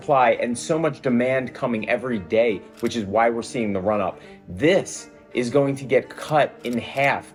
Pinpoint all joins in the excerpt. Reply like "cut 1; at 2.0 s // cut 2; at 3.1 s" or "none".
none